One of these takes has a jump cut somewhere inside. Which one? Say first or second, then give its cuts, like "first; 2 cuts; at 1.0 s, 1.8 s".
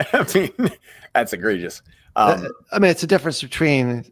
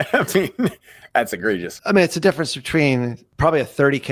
second; 2 cuts; at 1.7 s, 3.2 s